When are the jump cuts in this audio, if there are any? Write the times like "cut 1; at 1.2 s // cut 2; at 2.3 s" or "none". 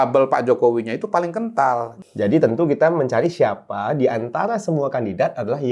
cut 1; at 1.9 s

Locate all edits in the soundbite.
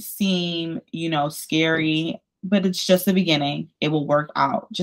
cut 1; at 2.3 s

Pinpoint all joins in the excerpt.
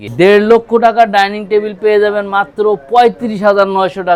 none

